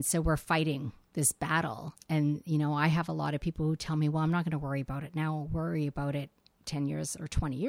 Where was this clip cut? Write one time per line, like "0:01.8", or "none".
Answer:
none